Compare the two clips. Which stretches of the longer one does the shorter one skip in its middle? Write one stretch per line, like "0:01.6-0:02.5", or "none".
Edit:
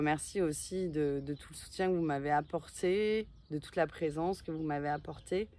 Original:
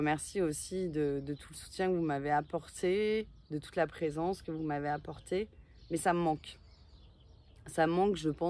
none